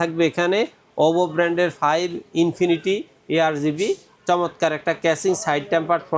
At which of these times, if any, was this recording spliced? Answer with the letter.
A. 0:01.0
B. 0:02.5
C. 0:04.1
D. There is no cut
D